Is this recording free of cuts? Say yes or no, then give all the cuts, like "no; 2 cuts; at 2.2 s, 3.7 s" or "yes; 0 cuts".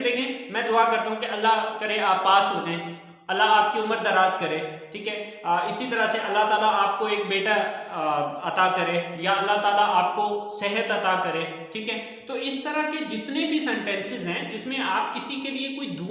yes; 0 cuts